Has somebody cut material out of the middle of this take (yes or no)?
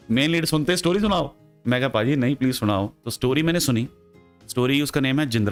no